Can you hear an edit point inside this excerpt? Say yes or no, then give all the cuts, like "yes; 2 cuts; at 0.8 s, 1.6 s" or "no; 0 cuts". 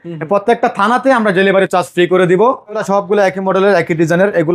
yes; 1 cut; at 2.8 s